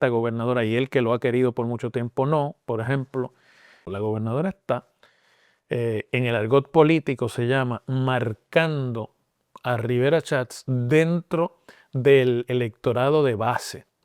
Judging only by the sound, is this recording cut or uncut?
cut